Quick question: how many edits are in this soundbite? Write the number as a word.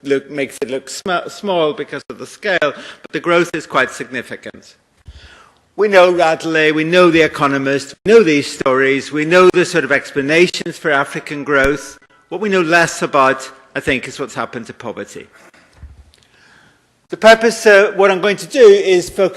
one